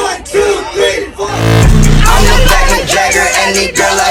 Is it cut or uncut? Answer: uncut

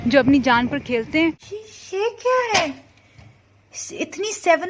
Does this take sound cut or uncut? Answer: cut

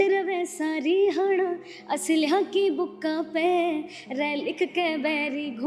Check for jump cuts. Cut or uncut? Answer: uncut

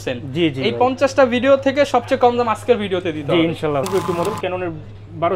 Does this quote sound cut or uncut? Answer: cut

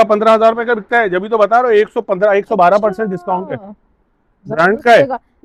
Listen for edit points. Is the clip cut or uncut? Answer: uncut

